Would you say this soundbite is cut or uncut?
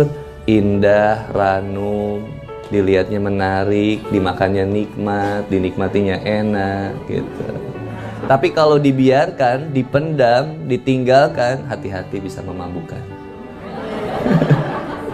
uncut